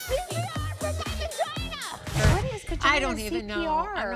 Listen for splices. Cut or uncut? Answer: cut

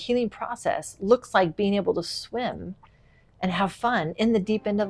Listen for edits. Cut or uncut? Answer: uncut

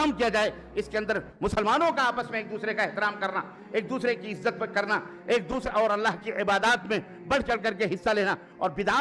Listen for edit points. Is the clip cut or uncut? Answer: uncut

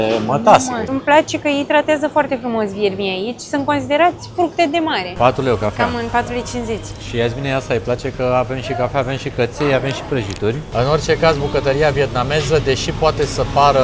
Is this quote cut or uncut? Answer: cut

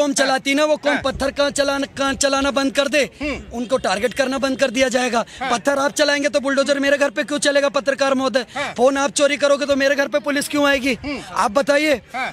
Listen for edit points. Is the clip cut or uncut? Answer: uncut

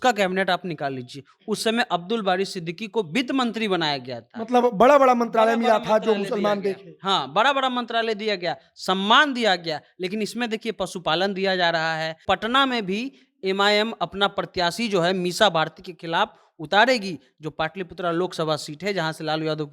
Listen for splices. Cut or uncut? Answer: cut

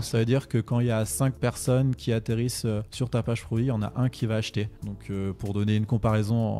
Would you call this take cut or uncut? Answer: uncut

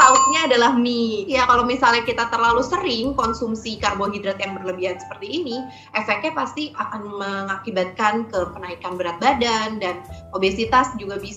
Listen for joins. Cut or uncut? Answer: cut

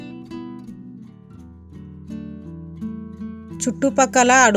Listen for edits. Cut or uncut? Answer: uncut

